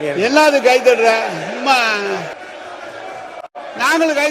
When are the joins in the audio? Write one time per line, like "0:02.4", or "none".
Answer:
0:02.4